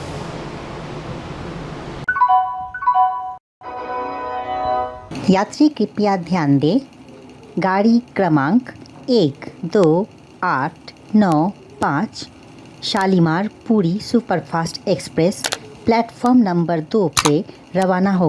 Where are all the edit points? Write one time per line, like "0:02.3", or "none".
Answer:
0:17.2